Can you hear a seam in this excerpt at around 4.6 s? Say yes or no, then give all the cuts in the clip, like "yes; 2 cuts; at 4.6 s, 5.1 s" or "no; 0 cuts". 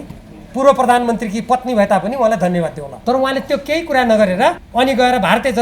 yes; 2 cuts; at 2.9 s, 4.6 s